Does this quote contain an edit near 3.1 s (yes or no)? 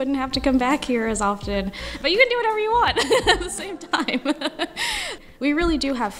no